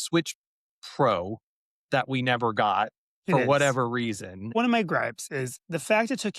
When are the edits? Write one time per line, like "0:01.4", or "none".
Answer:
0:04.5